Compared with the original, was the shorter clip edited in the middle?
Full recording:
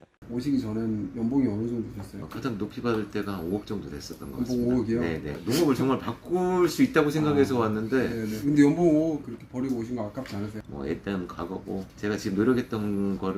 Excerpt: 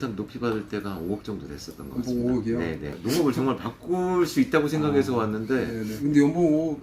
no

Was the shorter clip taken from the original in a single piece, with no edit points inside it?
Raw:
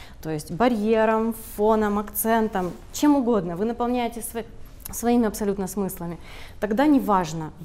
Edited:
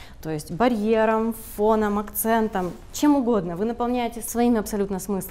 no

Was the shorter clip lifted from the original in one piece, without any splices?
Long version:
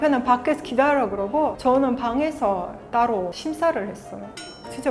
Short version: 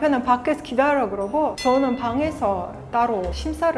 yes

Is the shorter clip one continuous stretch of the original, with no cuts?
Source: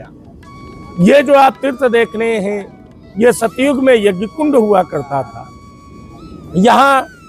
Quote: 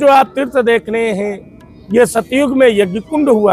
yes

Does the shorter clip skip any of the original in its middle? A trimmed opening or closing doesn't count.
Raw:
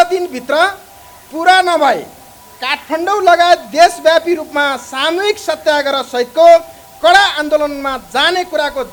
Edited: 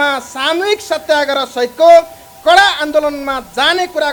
no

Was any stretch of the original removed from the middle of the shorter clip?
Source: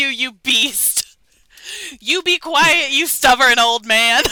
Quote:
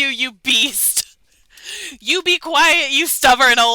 no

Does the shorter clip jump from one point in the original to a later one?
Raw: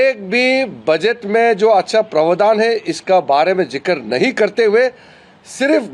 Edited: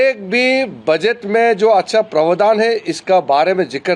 no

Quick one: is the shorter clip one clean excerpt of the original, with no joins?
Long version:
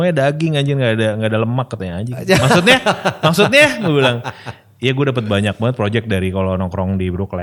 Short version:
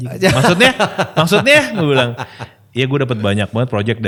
yes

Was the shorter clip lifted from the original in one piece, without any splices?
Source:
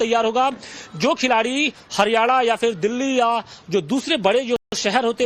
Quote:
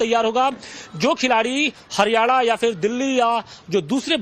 yes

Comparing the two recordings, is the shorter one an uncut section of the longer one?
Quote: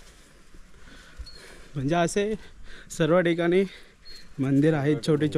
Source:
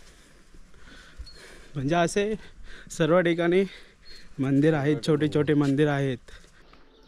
yes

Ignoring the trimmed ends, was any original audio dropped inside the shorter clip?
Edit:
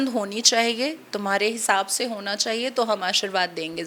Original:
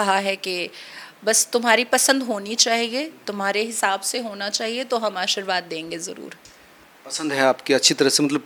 no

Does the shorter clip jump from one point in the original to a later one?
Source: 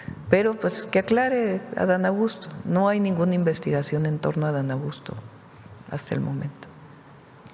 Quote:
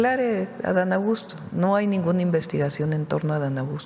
no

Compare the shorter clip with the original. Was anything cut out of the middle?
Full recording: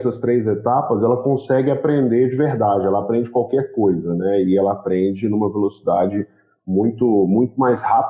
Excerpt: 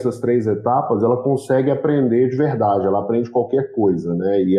no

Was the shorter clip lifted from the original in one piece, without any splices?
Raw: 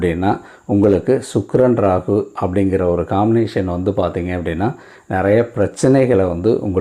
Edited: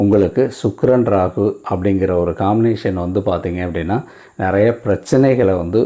yes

